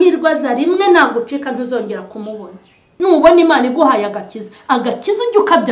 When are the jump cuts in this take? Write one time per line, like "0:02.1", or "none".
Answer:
0:02.9